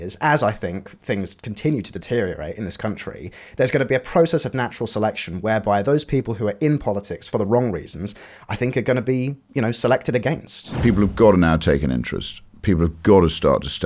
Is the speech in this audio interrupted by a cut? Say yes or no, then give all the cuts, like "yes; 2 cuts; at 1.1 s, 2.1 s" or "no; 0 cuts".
yes; 2 cuts; at 7.2 s, 10.7 s